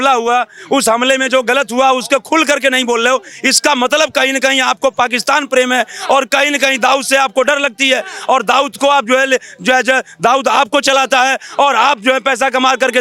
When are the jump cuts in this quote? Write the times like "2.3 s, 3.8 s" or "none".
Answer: none